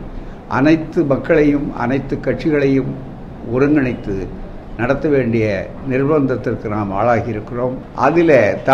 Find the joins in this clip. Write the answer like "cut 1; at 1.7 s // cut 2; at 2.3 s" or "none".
cut 1; at 7.8 s